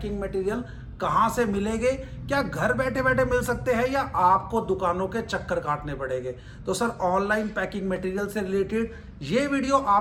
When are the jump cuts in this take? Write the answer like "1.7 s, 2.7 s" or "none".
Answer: none